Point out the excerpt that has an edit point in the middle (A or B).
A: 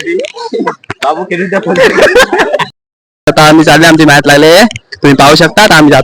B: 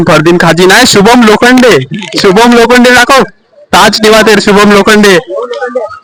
A